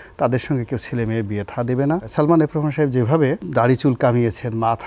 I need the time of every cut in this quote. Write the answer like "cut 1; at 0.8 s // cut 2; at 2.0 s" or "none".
cut 1; at 2.1 s // cut 2; at 3.4 s